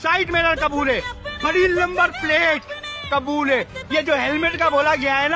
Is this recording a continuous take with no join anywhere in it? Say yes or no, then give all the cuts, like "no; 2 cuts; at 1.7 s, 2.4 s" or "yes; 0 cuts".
yes; 0 cuts